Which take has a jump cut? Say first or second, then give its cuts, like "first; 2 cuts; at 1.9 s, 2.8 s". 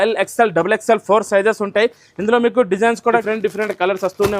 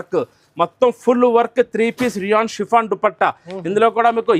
first; 1 cut; at 3.1 s